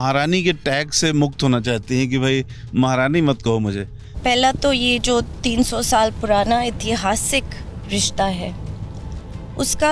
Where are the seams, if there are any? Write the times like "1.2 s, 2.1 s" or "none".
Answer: 4.1 s